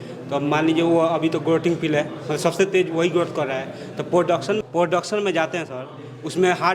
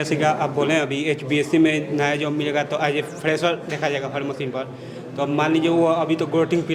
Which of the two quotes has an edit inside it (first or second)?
first